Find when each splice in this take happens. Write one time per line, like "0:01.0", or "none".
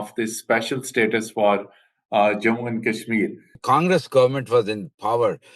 0:03.6